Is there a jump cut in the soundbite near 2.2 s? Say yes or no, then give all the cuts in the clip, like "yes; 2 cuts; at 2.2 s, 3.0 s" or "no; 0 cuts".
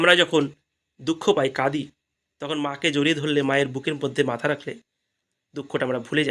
no; 1 cut; at 5.2 s